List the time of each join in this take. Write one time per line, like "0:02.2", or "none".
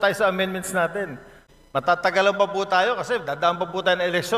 0:01.4

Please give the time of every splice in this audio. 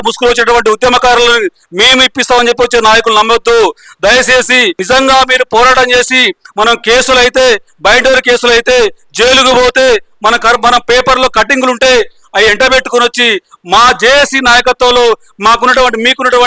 0:04.8

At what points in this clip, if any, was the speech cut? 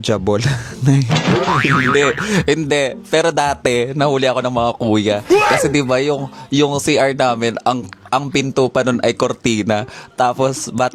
none

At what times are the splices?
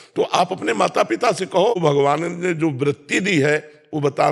0:01.8

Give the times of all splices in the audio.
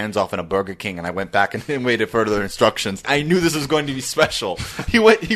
0:03.0

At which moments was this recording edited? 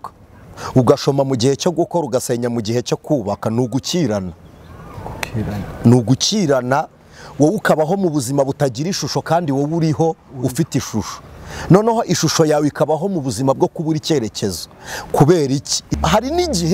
0:15.8

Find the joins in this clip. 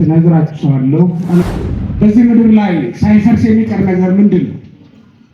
0:01.4

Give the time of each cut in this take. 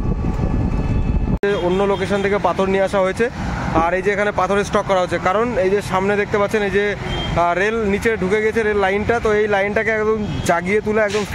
0:01.4

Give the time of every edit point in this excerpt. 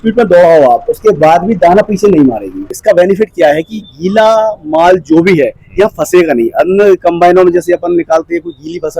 0:02.7

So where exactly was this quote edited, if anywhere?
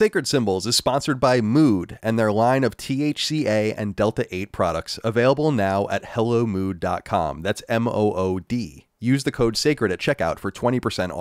none

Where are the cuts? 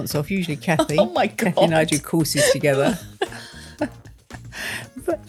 none

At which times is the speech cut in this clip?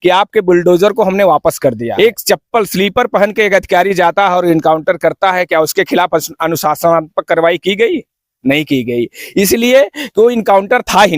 0:01.9

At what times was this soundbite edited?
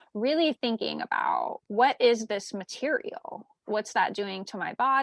0:03.6

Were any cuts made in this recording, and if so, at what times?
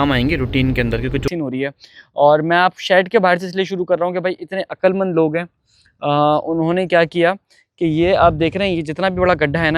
0:01.2

